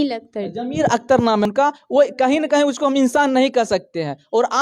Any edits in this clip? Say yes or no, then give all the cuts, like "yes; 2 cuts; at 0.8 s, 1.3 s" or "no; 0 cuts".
yes; 1 cut; at 1.4 s